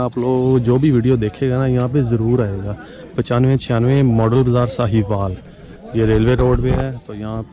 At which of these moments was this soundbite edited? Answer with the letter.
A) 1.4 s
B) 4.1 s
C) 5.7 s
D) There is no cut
D